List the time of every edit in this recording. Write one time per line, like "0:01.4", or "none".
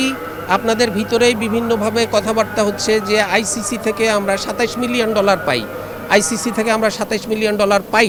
none

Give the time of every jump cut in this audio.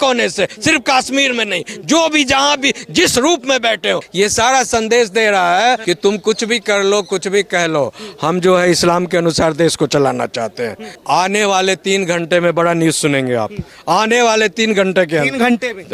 0:04.1
0:05.8
0:10.9

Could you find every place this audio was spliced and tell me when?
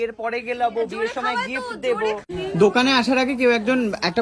0:02.2

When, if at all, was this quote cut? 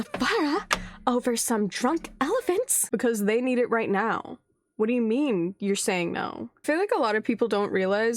0:06.6

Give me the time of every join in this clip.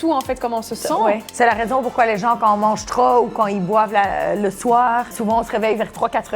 0:01.3
0:05.1

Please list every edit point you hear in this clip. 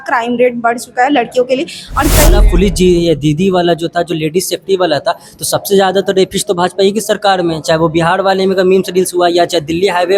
0:02.4

